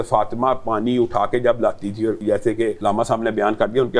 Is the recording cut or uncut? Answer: cut